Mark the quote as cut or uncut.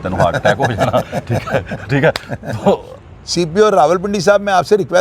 cut